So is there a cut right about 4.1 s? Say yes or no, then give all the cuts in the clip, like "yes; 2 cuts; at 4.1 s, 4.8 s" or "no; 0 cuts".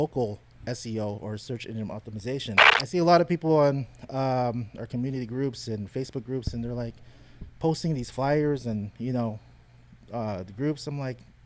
no; 1 cut; at 2.7 s